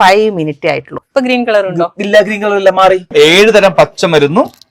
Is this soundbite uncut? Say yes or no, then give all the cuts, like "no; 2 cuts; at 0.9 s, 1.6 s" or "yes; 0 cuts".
no; 2 cuts; at 1.0 s, 3.1 s